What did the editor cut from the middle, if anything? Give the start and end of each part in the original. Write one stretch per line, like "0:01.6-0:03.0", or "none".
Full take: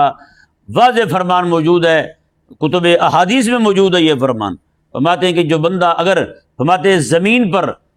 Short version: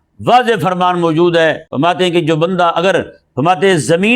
0:02.1-0:04.9